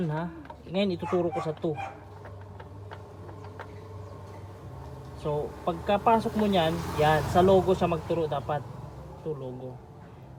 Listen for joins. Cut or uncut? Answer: uncut